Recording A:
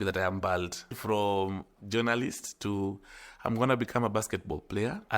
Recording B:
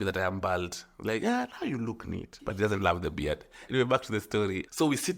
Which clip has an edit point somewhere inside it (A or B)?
A